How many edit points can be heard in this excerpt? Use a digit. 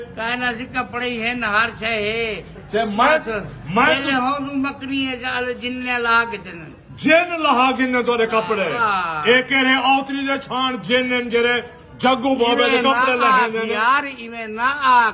0